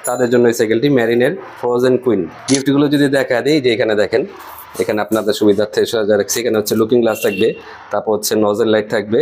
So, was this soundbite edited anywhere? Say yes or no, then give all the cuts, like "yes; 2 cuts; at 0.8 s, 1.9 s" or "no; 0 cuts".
yes; 1 cut; at 2.5 s